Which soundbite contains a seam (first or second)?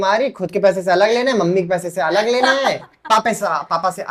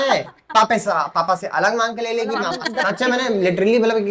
second